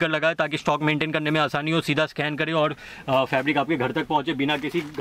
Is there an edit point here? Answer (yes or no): no